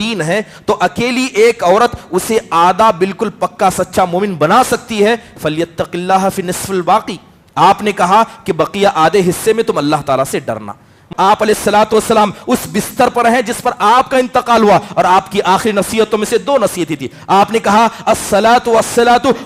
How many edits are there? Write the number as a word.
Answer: one